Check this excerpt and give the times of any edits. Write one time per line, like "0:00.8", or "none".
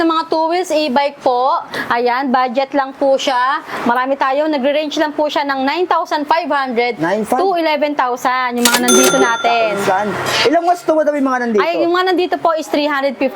none

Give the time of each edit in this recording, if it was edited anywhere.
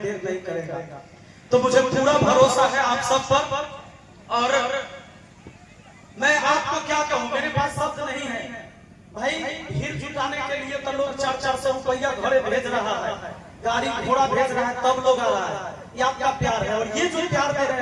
none

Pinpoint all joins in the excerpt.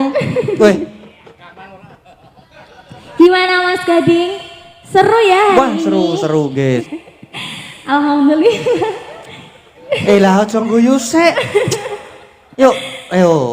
0:06.8

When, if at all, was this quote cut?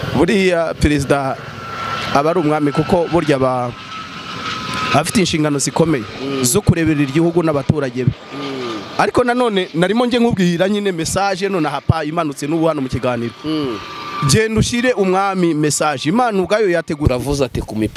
0:17.1

